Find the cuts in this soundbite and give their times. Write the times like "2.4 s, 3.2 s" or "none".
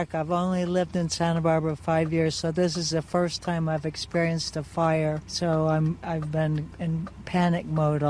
5.3 s, 6.7 s